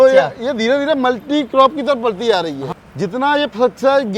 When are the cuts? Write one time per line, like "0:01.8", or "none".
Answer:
0:02.6